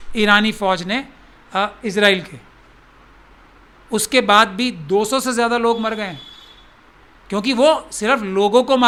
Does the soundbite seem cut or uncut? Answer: uncut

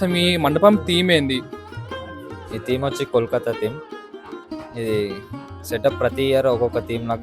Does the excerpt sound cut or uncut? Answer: uncut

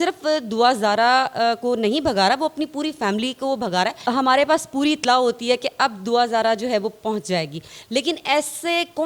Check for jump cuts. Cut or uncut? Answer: cut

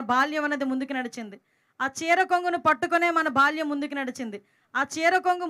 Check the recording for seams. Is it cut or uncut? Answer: uncut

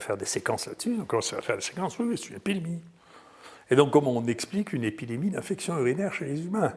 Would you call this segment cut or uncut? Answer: uncut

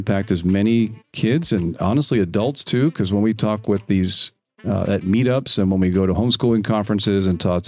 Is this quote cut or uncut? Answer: uncut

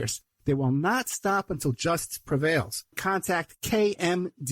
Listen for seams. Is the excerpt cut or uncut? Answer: cut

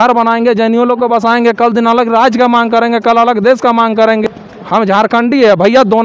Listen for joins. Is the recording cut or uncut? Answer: cut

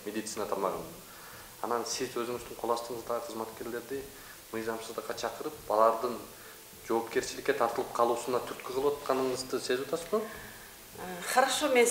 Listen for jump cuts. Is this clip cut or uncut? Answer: uncut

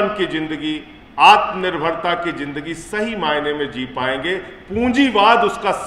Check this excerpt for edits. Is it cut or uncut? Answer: uncut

